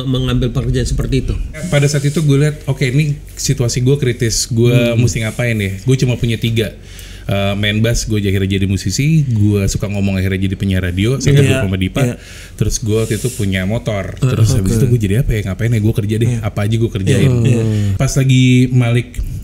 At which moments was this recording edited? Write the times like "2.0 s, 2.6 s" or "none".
1.6 s, 17.9 s